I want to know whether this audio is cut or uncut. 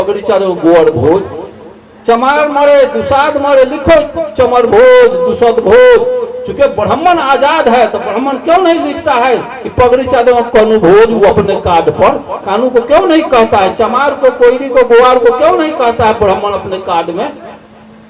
uncut